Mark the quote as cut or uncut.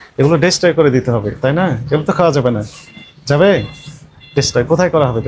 uncut